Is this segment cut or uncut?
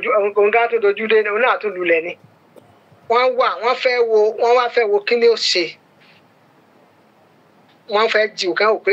cut